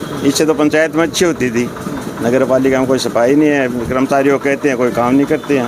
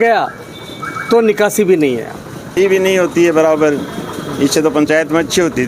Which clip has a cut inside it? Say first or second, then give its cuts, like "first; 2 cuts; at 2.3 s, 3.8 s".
second; 1 cut; at 2.6 s